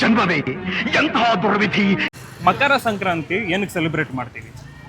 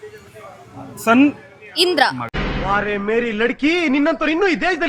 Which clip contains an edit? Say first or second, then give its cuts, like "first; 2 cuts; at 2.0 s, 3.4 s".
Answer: first; 1 cut; at 2.0 s